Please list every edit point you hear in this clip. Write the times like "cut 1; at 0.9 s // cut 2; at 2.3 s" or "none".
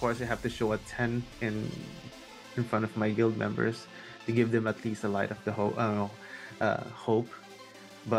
none